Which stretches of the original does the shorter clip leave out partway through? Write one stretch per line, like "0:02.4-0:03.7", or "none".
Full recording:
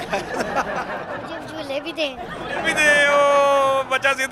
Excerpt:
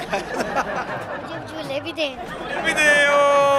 none